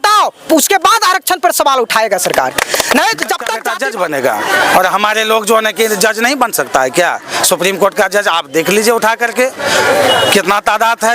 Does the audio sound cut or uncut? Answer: cut